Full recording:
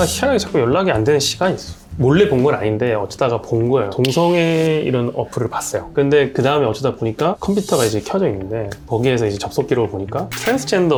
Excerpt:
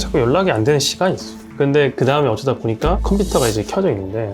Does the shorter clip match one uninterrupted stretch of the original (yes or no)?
no